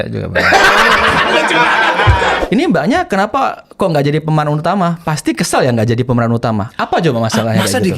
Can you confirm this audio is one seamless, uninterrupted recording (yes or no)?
no